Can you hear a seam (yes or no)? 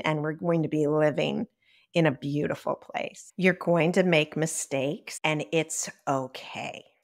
yes